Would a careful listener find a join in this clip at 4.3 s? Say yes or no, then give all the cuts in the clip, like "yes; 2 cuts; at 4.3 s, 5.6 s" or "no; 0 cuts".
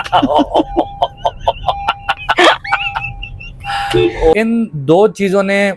yes; 1 cut; at 4.3 s